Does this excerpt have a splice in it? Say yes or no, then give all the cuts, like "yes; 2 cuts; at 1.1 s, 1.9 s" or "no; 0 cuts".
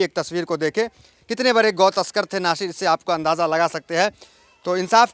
no; 0 cuts